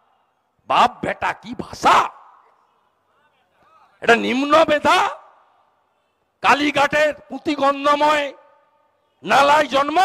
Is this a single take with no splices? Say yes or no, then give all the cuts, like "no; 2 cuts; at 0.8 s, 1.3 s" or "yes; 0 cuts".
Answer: yes; 0 cuts